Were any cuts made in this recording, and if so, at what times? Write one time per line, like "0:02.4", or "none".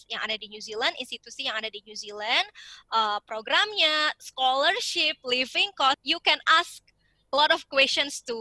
0:06.0